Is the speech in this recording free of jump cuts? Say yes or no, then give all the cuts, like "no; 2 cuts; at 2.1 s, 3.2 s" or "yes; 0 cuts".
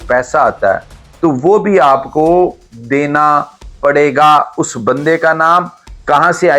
yes; 0 cuts